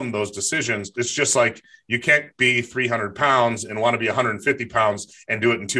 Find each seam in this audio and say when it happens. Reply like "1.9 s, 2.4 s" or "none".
1.0 s